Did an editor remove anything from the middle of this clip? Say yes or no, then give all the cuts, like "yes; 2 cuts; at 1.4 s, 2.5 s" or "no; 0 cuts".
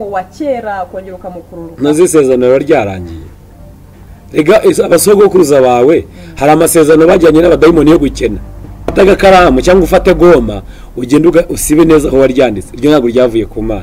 yes; 1 cut; at 8.9 s